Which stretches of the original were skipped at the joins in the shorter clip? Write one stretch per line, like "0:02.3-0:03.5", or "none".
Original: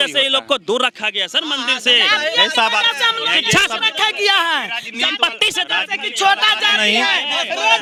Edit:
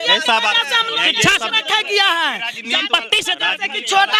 none